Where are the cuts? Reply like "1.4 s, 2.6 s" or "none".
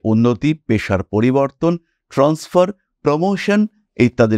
none